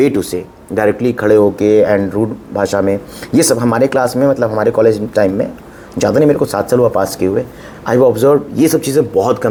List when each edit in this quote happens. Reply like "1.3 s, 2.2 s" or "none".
none